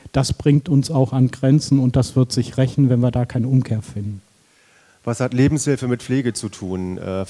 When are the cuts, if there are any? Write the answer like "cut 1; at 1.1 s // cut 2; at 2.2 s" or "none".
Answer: none